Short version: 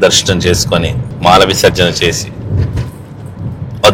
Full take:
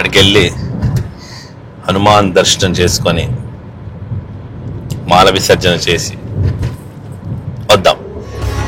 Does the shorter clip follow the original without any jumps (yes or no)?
no